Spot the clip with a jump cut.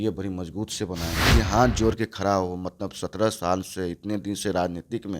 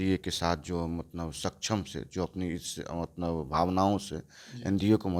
first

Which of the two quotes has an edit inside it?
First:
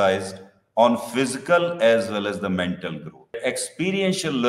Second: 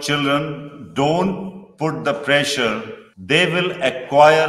first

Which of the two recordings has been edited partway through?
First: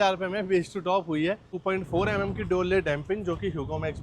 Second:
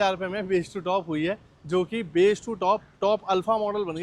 first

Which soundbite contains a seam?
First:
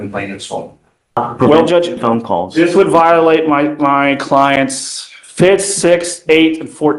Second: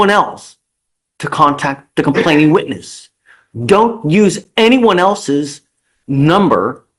first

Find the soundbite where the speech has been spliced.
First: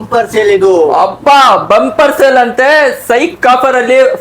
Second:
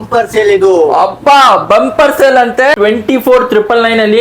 second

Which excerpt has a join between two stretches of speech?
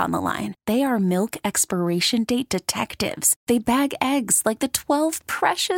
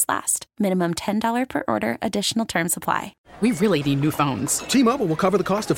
second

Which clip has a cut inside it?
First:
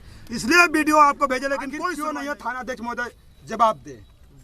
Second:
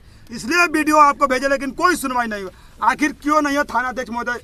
first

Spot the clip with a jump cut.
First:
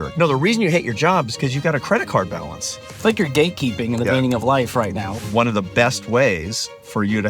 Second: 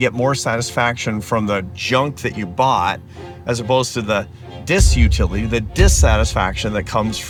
first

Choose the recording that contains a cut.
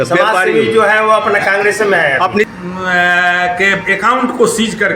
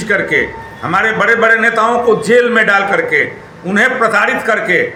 first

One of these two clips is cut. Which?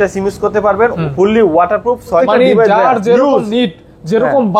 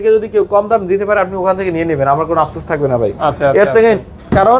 first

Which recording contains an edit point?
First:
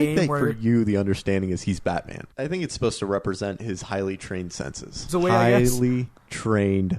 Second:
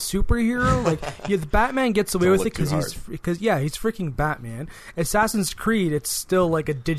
first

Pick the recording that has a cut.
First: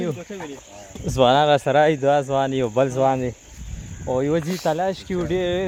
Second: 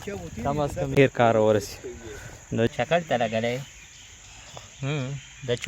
second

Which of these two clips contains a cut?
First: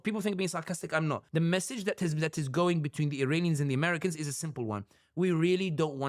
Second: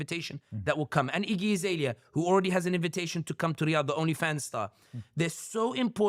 first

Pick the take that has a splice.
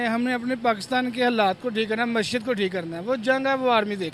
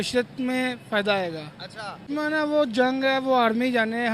second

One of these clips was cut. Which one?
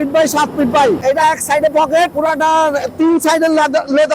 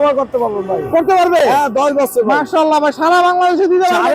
first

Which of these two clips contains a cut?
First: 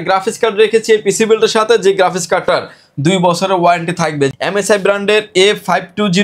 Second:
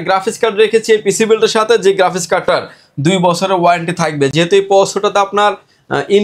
first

